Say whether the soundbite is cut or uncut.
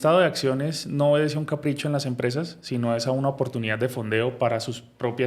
uncut